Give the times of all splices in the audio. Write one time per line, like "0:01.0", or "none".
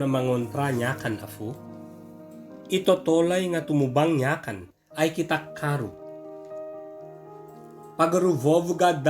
0:05.9
0:07.9